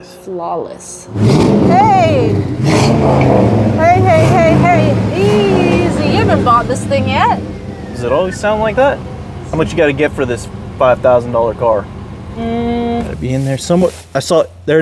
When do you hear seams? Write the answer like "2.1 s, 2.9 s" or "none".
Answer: 1.2 s, 9.4 s, 13.1 s

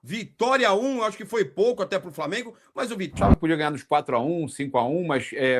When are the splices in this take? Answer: 3.1 s

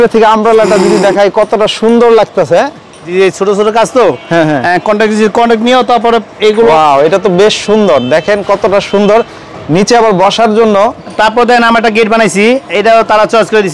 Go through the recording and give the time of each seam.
3.0 s, 6.7 s, 11.1 s

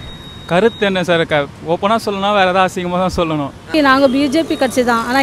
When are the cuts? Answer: 3.6 s

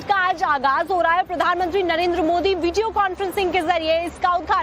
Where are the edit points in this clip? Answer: 2.6 s

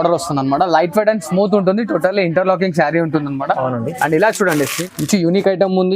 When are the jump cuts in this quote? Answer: 4.8 s

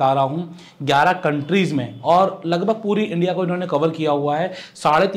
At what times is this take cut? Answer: none

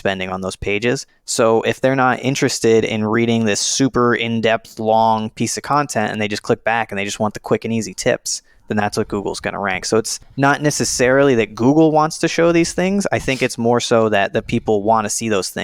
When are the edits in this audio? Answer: 1.2 s, 10.2 s

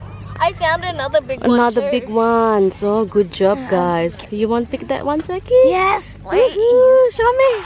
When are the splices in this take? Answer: none

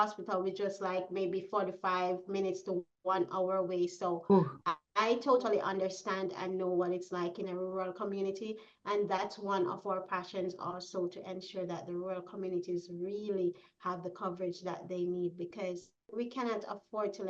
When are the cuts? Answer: 16.1 s

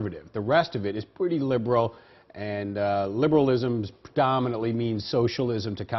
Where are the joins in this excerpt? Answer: 4.2 s

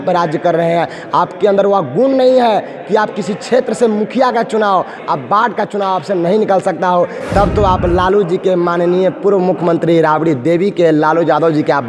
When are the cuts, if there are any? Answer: none

